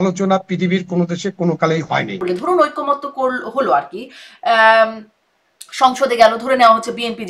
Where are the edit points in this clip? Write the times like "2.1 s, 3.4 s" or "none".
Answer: 2.2 s